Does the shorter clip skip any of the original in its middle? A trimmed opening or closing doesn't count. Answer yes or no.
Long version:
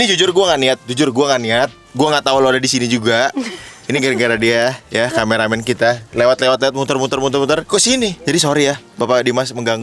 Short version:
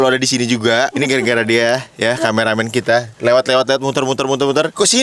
yes